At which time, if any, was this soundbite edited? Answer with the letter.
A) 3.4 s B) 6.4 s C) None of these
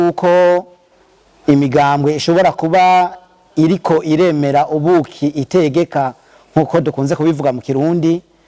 C